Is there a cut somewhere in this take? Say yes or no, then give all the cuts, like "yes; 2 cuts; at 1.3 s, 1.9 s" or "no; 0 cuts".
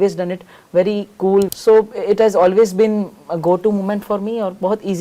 yes; 1 cut; at 1.5 s